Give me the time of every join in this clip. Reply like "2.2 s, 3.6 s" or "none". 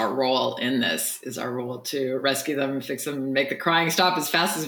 none